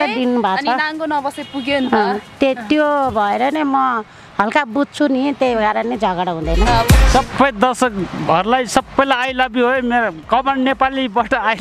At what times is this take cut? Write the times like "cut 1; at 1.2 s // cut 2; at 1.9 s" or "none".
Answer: cut 1; at 7.0 s